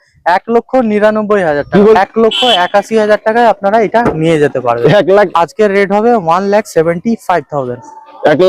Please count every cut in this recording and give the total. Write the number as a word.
two